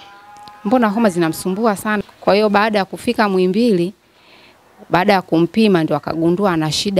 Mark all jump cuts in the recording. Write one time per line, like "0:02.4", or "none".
0:02.0